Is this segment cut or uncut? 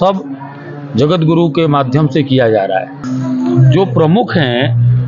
cut